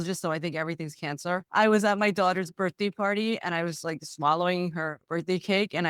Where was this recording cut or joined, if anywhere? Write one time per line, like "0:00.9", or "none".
none